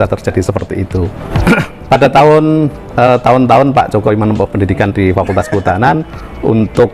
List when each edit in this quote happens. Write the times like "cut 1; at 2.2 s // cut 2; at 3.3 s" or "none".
cut 1; at 1.2 s